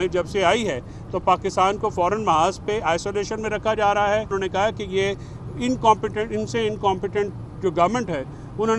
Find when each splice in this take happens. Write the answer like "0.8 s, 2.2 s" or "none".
none